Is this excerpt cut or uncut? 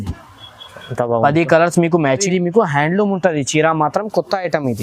cut